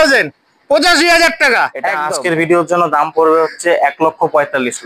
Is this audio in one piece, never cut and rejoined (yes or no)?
no